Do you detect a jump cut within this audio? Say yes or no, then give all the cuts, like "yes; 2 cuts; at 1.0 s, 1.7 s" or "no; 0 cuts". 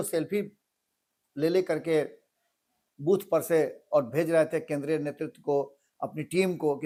no; 0 cuts